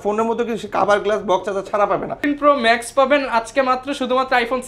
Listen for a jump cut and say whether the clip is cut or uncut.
cut